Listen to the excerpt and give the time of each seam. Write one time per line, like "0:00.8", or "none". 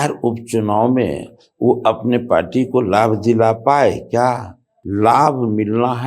0:04.6